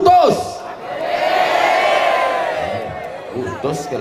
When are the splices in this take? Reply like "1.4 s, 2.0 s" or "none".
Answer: none